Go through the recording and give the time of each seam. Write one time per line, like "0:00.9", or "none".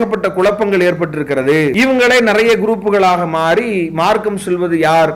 0:01.7